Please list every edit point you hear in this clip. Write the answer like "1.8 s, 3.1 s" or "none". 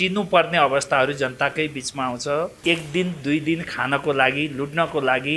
2.6 s